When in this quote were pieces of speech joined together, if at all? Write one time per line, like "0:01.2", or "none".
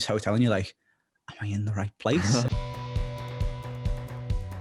0:02.5